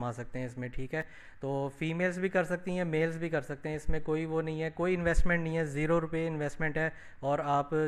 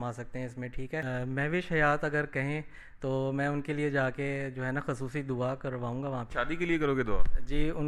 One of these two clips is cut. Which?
second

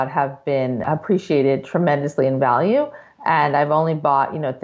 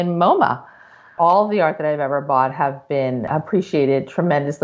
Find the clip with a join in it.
second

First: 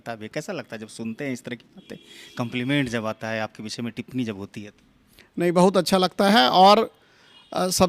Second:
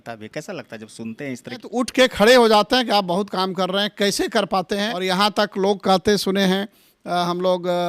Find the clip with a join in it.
second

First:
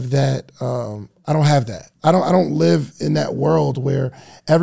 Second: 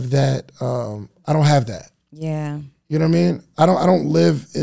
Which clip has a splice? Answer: first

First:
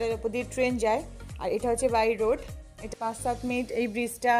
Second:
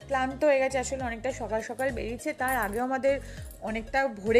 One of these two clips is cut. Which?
first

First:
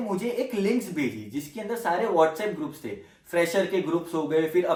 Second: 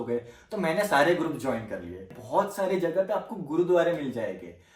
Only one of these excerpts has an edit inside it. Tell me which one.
second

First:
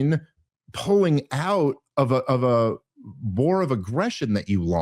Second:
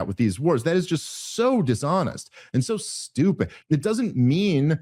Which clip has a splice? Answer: second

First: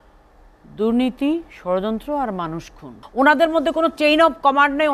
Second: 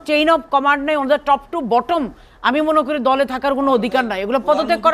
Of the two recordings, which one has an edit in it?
first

